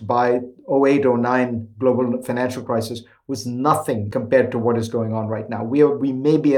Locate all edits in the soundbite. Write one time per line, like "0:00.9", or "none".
0:04.1